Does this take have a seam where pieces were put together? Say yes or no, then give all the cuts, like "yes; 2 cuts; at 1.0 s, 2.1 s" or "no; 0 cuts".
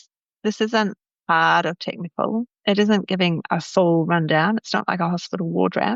no; 0 cuts